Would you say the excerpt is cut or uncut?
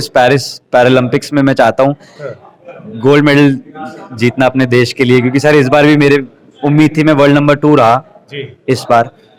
uncut